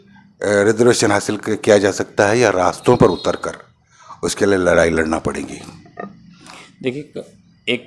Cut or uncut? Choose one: uncut